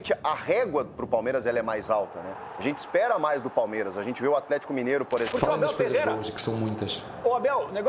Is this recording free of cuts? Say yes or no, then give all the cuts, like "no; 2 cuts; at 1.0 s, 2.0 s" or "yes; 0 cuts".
no; 1 cut; at 5.3 s